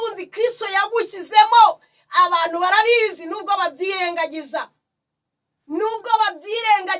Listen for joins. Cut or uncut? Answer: uncut